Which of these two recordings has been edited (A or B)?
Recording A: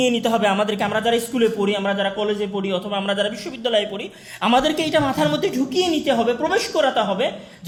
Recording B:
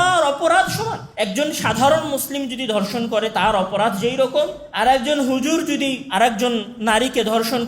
B